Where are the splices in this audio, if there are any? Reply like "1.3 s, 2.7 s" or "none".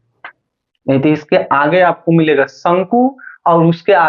none